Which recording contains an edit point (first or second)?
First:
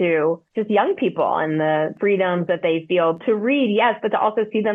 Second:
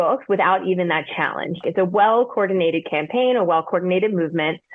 second